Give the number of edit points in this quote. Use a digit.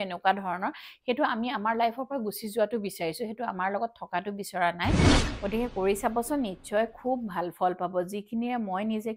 1